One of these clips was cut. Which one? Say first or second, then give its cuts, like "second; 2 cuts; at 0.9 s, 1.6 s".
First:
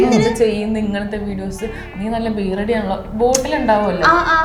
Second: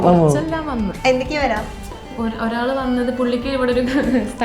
second; 2 cuts; at 0.9 s, 2.1 s